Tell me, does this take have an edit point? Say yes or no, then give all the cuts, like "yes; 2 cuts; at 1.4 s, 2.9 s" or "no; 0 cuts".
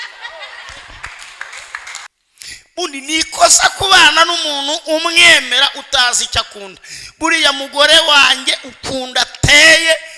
yes; 1 cut; at 2.1 s